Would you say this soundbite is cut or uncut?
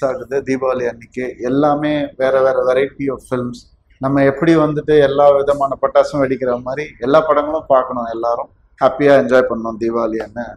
uncut